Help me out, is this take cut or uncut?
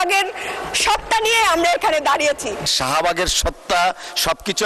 cut